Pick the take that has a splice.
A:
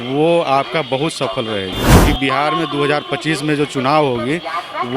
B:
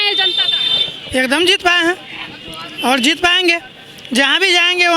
A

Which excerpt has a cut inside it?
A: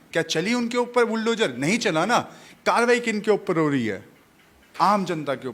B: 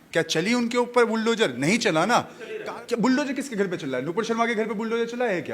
B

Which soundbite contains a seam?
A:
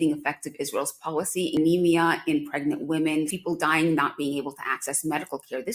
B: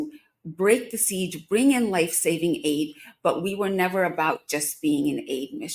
A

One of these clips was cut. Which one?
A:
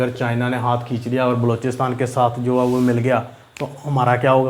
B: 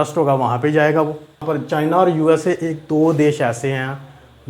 B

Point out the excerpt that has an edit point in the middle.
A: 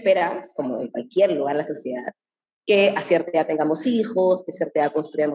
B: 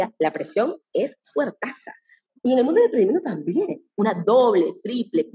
B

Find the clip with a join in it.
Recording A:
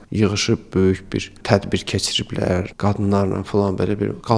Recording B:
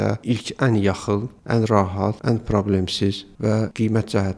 B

